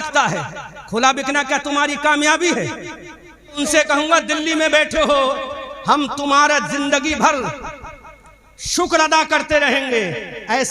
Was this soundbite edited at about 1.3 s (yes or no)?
no